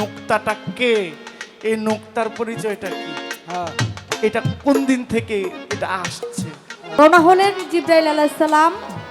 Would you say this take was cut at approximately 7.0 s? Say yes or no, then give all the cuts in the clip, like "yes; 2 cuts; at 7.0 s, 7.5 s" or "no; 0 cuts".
yes; 1 cut; at 7.0 s